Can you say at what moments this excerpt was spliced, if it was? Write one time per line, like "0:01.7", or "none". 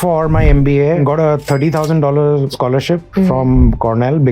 0:01.0